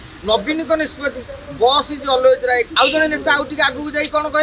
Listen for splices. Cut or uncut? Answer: cut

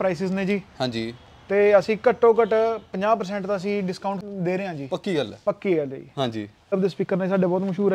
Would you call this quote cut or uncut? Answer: cut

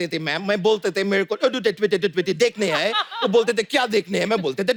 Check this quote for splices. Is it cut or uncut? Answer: uncut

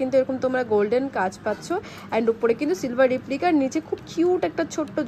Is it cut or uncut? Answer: uncut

